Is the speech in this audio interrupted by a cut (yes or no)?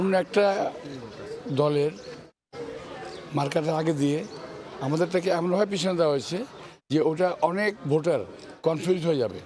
no